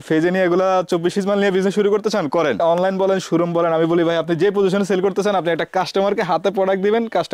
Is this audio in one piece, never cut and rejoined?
no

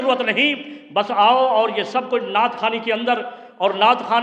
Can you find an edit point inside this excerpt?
no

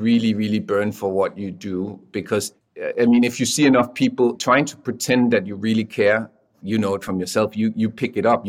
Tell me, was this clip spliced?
yes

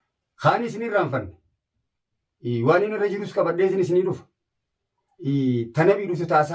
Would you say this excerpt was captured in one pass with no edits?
yes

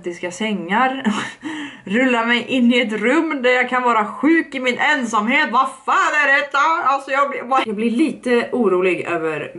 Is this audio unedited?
no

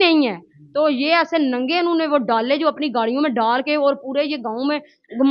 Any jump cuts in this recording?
no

